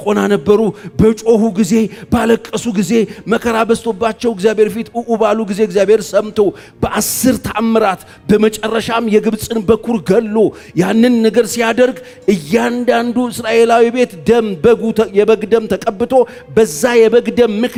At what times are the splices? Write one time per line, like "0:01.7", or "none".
none